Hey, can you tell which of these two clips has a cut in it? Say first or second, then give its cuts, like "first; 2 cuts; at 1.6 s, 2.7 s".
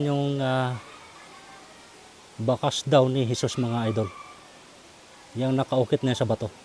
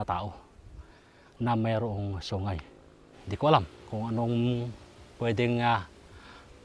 second; 1 cut; at 2.6 s